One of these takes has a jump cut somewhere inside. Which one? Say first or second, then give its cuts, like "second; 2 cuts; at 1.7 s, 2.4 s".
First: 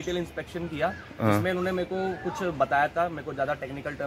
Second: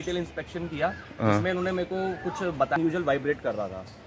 second; 1 cut; at 2.8 s